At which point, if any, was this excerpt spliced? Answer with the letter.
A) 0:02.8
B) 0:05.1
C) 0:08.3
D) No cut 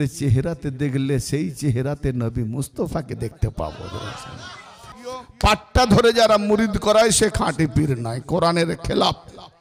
B